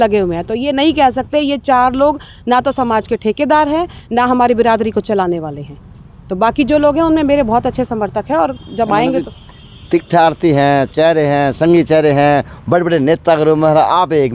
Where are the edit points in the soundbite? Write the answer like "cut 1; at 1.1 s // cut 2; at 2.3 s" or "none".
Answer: none